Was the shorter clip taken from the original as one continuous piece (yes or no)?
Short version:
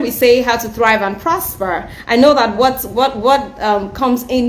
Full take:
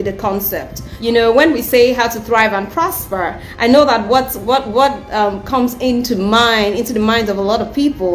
yes